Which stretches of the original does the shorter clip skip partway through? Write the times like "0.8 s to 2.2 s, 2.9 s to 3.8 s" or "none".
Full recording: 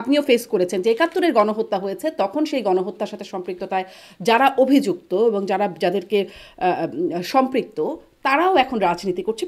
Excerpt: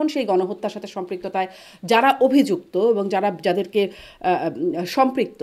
none